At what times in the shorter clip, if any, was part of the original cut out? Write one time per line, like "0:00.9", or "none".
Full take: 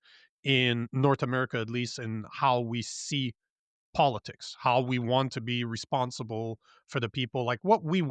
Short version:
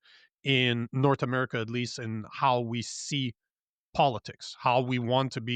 none